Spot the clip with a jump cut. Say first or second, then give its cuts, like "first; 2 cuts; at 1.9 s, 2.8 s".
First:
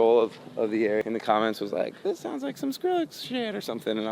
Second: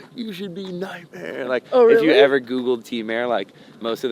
first; 1 cut; at 1.0 s